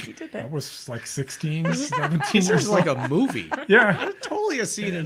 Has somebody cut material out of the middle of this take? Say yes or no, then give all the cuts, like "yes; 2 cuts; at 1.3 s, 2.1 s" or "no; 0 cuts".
no; 0 cuts